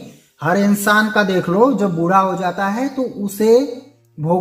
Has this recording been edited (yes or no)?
no